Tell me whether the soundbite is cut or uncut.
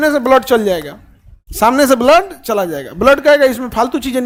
uncut